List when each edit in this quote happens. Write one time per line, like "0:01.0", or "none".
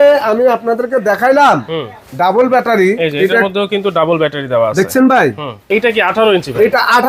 0:05.5